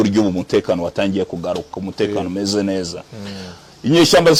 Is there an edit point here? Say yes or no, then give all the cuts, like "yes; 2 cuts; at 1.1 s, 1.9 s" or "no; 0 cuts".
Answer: no; 0 cuts